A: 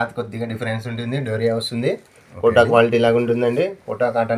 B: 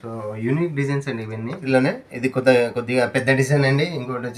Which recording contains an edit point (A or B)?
B